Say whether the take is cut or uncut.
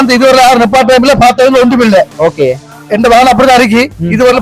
uncut